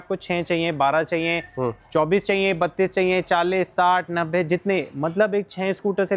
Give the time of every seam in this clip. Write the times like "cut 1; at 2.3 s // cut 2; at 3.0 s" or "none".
none